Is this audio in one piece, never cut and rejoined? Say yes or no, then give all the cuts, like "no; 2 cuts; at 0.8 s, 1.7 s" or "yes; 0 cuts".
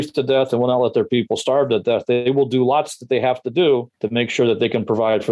no; 1 cut; at 4.0 s